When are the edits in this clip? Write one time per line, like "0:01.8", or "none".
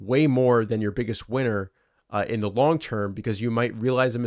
none